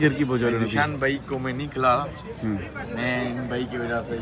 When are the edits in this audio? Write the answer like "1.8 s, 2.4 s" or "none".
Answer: none